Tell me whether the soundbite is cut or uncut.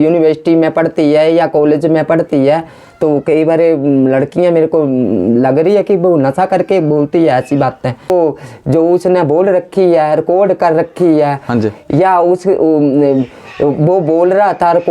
cut